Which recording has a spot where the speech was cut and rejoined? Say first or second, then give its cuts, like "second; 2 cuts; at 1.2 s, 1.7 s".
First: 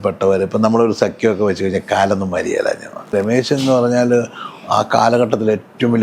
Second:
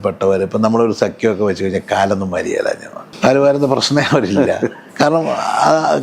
first; 1 cut; at 2.9 s